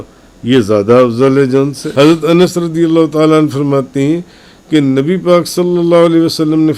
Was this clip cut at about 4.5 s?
no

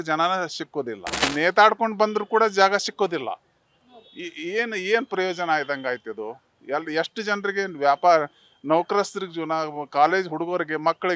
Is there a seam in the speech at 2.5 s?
no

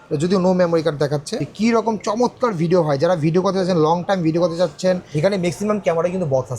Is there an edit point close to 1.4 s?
yes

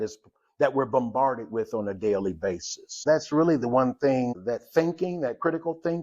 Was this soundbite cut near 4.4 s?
yes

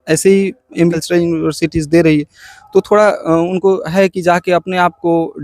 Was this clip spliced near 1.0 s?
yes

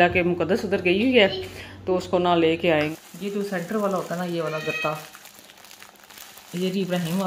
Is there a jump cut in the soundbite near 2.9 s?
yes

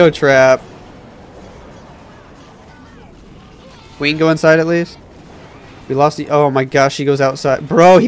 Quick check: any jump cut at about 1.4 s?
no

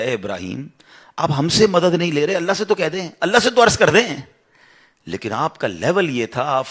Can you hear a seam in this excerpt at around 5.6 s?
no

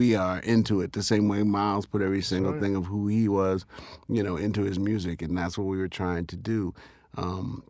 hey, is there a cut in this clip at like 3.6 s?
no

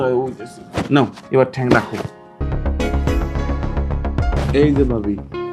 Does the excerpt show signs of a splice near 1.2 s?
no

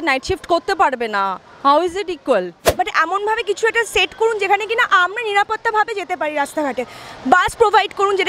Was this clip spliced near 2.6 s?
yes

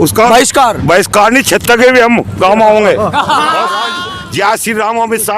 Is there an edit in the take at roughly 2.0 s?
no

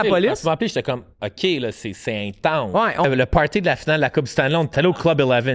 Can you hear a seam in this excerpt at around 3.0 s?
yes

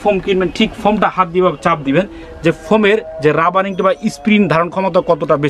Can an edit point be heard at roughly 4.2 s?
no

